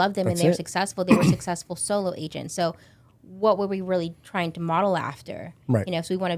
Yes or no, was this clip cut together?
no